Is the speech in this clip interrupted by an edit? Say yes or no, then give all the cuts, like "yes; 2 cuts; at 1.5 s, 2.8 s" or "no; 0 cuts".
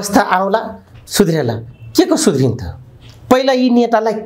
no; 0 cuts